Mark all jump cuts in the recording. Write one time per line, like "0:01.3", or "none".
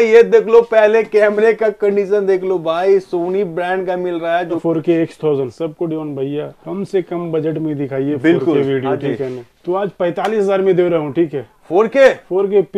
0:04.6
0:05.5
0:06.6
0:09.5